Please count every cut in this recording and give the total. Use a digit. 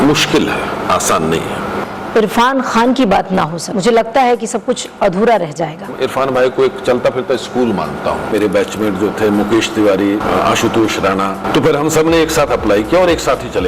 6